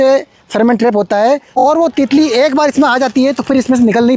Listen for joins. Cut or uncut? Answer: cut